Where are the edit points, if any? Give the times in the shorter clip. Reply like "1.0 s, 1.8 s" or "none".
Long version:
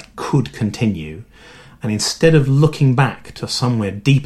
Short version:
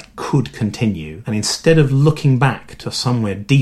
1.1 s